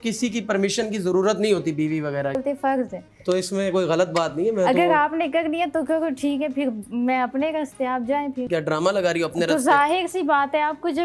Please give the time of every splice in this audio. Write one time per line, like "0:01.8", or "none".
0:02.4
0:08.5